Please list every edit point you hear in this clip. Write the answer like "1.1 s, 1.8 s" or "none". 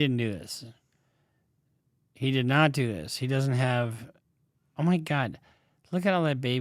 none